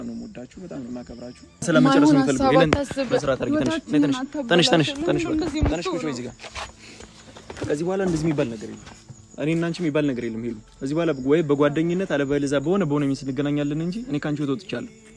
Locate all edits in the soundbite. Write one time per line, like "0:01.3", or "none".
0:01.6